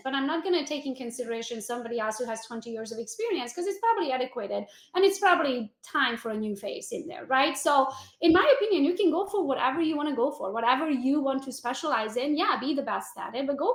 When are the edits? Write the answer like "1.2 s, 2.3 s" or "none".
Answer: none